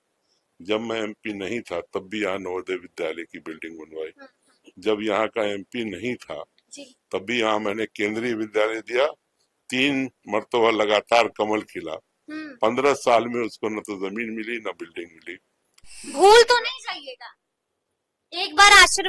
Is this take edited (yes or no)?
yes